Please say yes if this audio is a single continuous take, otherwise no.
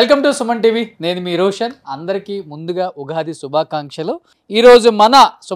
no